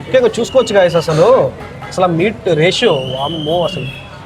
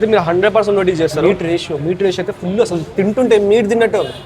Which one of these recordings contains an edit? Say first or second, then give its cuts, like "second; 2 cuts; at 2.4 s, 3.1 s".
second; 1 cut; at 1.2 s